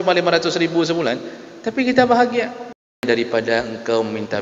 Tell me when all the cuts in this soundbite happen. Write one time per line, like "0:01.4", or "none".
0:03.0